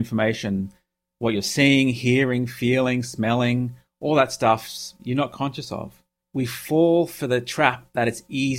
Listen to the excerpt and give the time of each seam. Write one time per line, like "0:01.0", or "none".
0:06.2